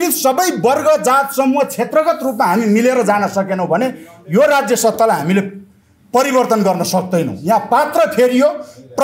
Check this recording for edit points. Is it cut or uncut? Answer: uncut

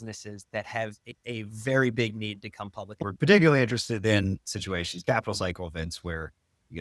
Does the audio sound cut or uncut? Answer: cut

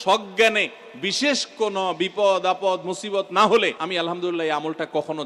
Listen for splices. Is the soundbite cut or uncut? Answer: cut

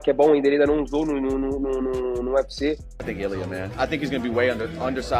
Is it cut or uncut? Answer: cut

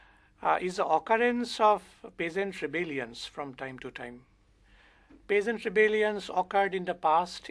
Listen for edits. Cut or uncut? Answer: cut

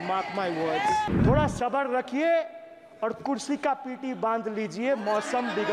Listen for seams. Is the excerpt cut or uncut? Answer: cut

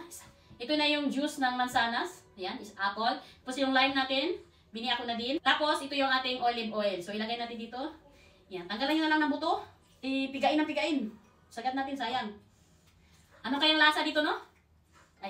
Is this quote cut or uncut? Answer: uncut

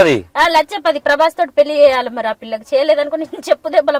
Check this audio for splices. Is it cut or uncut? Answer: uncut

